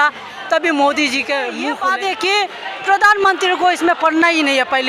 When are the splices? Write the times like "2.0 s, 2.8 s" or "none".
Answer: 1.7 s